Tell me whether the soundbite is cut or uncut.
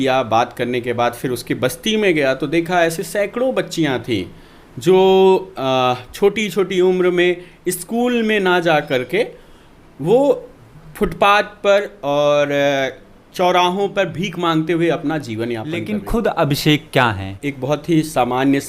cut